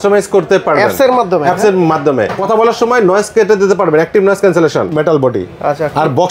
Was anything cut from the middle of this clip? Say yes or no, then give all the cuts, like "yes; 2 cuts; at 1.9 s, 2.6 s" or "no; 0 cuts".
yes; 2 cuts; at 2.4 s, 4.9 s